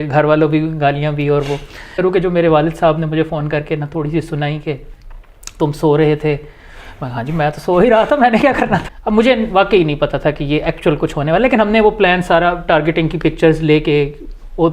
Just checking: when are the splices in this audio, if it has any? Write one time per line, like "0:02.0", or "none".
0:01.9
0:08.9